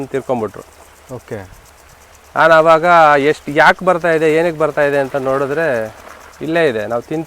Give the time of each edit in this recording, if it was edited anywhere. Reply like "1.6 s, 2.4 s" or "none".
none